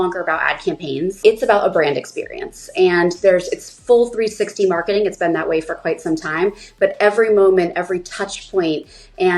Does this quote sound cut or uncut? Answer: cut